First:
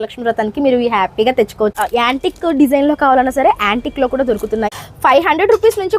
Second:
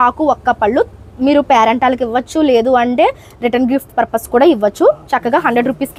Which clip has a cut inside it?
first; 2 cuts; at 1.8 s, 4.7 s

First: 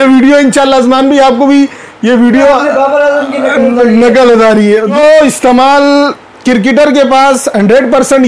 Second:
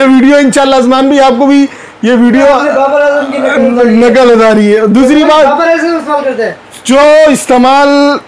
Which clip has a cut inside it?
first; 1 cut; at 4.9 s

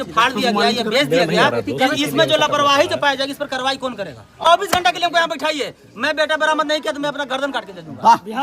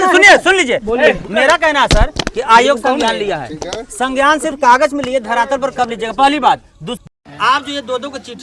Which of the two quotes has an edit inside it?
first; 1 cut; at 4.4 s

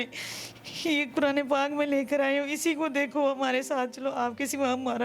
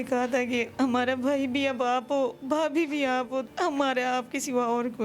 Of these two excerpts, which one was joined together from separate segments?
second; 1 cut; at 3.5 s

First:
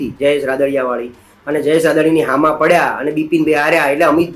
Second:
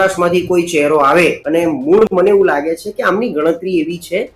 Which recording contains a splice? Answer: second; 1 cut; at 1.4 s

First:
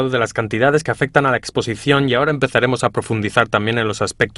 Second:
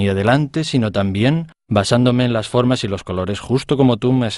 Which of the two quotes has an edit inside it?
first; 1 cut; at 1.4 s

